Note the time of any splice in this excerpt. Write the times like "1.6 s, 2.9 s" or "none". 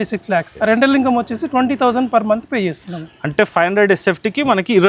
none